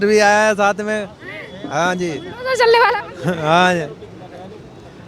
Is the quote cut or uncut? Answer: uncut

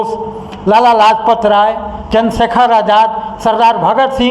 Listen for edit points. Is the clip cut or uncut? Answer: uncut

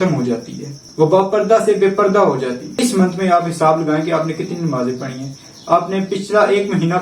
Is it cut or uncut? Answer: cut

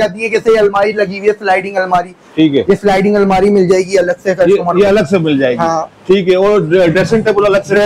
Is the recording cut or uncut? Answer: uncut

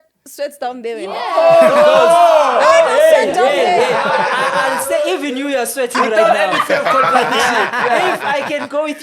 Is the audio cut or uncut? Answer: cut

